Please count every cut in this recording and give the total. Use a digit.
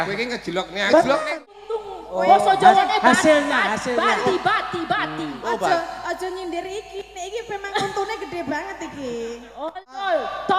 2